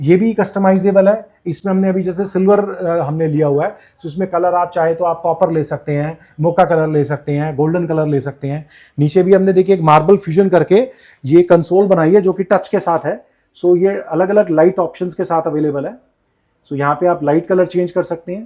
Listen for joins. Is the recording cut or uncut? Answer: uncut